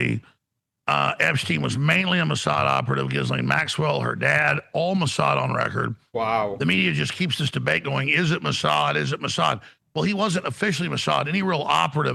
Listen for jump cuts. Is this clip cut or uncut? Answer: uncut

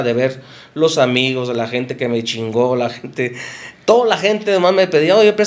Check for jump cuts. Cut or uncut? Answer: uncut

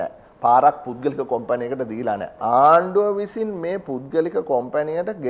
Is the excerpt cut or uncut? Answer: cut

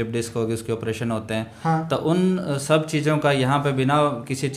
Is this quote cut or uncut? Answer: uncut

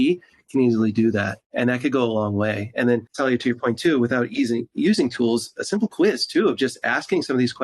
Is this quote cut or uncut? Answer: cut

